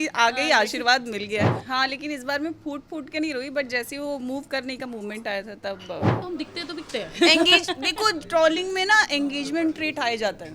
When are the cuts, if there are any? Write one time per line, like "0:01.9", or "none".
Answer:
0:01.6
0:06.2